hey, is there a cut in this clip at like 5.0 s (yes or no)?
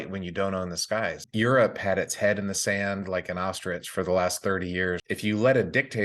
yes